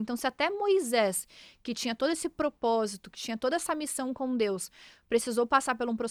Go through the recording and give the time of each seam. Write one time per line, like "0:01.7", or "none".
none